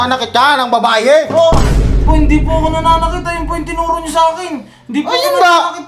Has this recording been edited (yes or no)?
no